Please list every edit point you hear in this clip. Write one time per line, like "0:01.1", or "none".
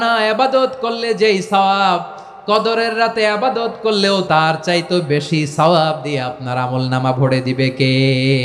0:04.2